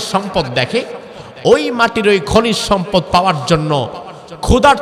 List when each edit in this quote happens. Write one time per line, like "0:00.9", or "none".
none